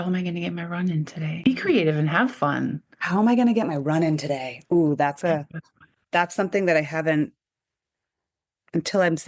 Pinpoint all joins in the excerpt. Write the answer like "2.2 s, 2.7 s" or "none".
1.4 s